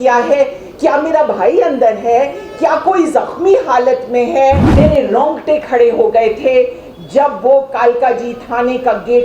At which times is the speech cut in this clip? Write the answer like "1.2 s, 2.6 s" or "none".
4.7 s